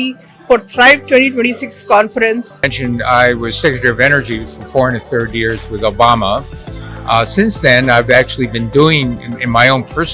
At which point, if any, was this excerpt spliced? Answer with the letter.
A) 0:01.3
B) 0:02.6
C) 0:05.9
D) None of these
B